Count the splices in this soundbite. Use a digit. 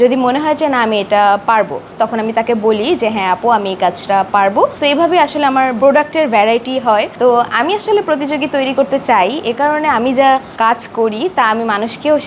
3